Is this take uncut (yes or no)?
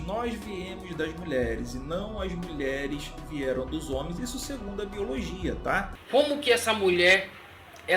no